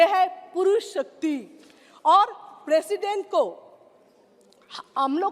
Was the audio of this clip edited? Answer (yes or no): no